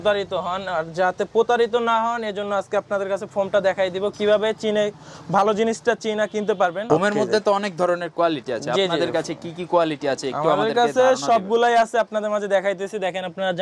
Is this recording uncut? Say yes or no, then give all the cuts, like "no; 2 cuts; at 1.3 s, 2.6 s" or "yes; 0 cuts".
yes; 0 cuts